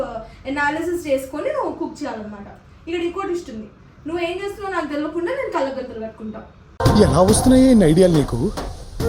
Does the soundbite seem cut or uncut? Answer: uncut